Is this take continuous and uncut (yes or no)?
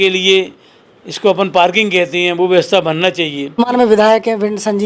no